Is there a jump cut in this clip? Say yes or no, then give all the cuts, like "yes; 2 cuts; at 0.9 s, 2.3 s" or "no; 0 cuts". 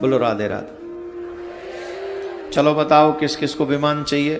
no; 0 cuts